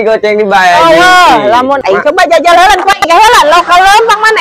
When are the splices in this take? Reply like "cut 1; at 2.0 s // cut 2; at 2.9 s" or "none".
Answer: cut 1; at 1.8 s

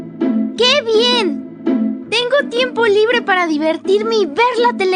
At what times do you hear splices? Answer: none

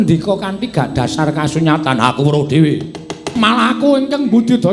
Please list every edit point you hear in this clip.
cut 1; at 3.3 s

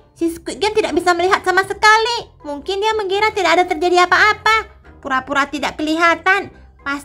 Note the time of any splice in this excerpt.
cut 1; at 4.9 s

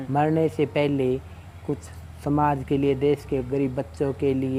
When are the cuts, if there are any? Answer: none

